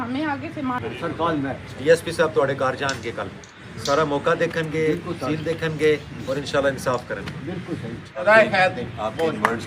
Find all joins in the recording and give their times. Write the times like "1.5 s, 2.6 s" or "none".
0.7 s, 3.4 s, 8.2 s